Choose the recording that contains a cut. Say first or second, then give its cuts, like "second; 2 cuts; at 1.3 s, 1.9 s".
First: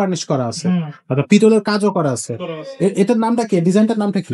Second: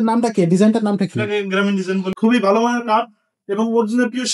second; 1 cut; at 2.1 s